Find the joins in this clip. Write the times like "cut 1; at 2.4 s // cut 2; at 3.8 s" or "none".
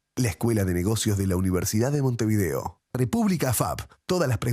cut 1; at 2.8 s